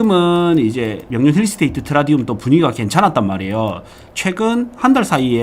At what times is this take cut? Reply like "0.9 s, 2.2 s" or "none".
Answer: 1.0 s

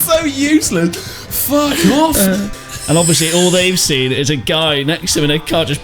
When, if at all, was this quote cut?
2.6 s

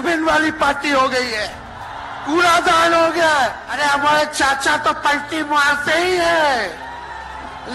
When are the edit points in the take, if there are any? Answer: 3.7 s

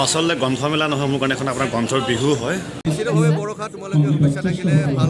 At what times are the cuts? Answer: 2.8 s

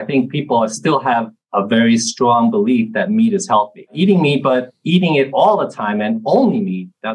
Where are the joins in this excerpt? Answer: 1.4 s, 3.9 s

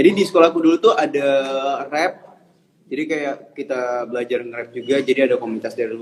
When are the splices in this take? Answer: none

